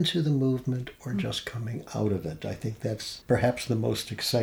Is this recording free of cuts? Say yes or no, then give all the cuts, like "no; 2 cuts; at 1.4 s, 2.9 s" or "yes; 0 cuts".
no; 1 cut; at 3.1 s